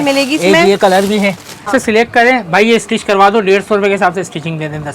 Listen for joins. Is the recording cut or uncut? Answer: cut